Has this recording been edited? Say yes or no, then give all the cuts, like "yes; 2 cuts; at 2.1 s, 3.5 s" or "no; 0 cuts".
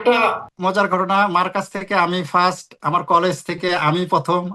no; 0 cuts